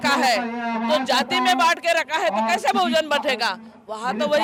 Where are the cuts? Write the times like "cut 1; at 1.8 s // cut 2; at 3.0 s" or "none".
none